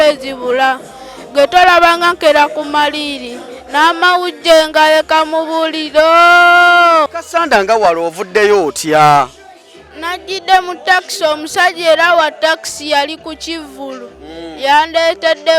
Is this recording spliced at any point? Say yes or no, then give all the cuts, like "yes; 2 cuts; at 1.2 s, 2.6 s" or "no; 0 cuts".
yes; 1 cut; at 7.2 s